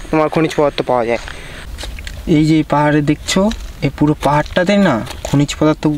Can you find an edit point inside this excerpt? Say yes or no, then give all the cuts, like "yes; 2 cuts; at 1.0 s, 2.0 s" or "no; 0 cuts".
yes; 1 cut; at 1.6 s